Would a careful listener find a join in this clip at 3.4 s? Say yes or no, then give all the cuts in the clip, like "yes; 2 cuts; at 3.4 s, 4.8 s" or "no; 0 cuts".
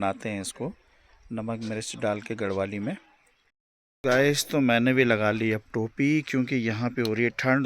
yes; 1 cut; at 3.4 s